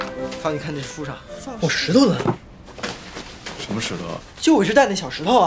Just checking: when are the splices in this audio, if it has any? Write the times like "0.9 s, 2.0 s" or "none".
1.3 s